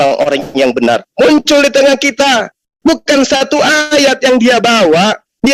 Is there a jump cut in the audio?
no; 0 cuts

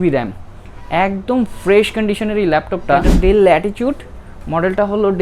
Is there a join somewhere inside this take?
yes; 1 cut; at 3.1 s

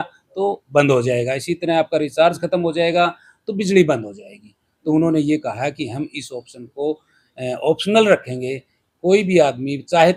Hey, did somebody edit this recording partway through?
no; 0 cuts

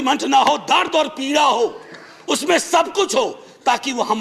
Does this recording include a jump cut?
no; 0 cuts

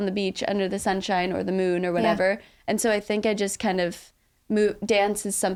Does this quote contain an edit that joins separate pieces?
no; 0 cuts

